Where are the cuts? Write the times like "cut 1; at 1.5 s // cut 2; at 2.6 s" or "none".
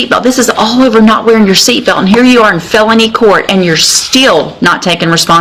none